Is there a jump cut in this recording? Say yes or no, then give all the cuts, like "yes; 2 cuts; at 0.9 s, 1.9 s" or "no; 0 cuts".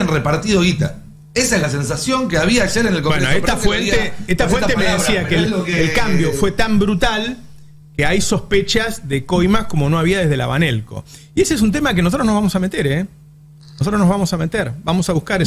no; 0 cuts